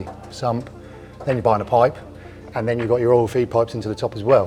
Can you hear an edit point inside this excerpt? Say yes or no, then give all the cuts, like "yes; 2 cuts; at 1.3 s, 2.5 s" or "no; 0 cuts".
no; 0 cuts